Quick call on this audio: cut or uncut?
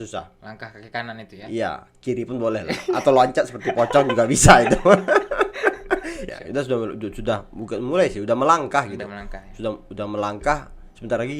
cut